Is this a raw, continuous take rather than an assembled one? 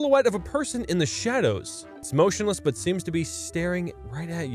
no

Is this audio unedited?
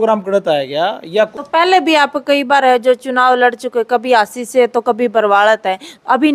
no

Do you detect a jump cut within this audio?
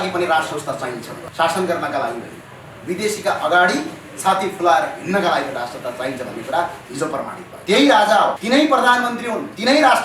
yes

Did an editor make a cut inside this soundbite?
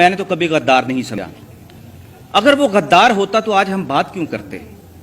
yes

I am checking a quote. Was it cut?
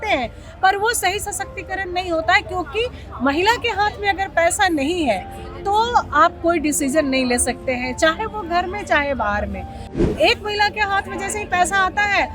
yes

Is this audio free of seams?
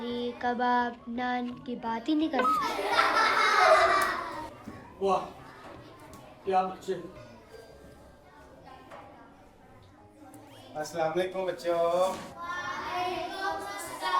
yes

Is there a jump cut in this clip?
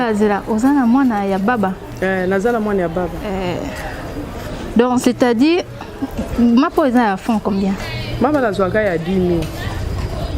yes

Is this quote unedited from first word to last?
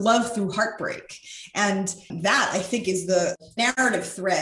no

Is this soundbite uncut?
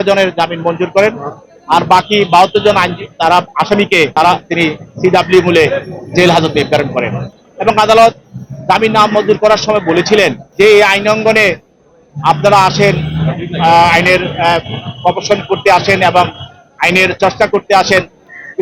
yes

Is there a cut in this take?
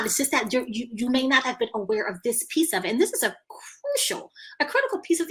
no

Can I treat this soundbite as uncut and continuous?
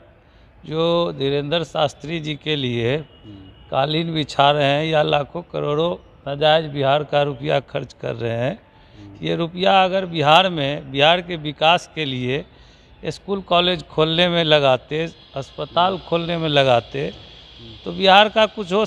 yes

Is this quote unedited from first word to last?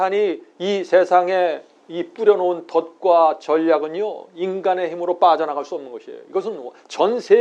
yes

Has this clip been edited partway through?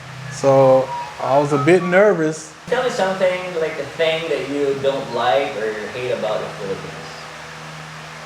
yes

